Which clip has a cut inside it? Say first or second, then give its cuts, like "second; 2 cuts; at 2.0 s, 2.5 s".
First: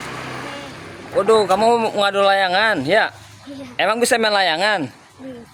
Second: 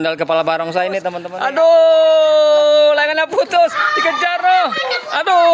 second; 1 cut; at 1.2 s